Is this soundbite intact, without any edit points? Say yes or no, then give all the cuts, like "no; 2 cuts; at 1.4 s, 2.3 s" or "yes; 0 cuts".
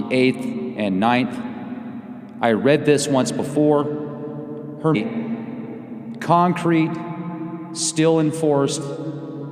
yes; 0 cuts